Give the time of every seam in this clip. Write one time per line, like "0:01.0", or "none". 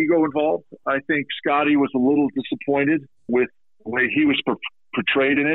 0:03.1